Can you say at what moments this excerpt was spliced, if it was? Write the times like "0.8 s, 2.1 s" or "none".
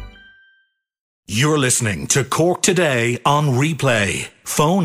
1.3 s